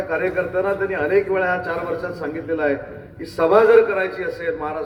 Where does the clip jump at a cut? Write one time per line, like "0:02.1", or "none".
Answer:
none